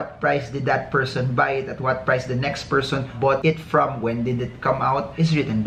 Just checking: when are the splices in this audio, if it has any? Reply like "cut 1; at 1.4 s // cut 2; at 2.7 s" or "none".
none